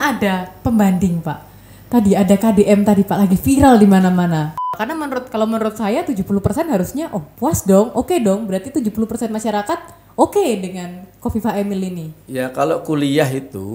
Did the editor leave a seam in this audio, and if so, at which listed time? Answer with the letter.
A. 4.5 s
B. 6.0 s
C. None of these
A